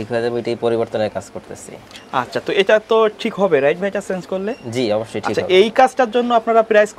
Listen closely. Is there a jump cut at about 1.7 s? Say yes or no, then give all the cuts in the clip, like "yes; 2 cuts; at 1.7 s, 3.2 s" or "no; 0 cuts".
no; 0 cuts